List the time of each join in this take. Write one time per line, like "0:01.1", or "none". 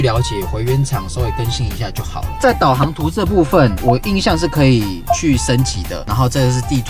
none